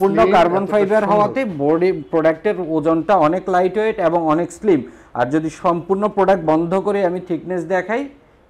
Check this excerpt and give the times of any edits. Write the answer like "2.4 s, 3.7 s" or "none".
none